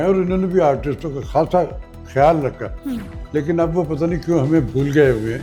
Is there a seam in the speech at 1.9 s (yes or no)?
no